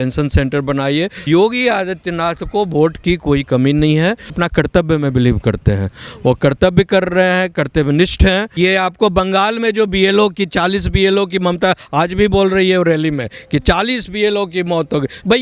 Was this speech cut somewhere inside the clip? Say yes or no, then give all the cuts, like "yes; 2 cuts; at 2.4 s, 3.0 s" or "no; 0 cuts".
yes; 2 cuts; at 1.2 s, 8.6 s